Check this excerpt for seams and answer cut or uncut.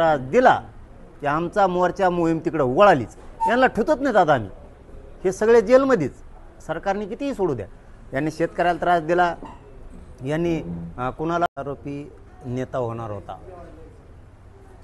cut